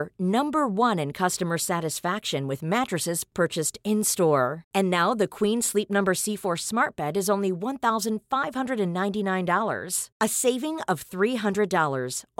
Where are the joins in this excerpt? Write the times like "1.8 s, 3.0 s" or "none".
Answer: none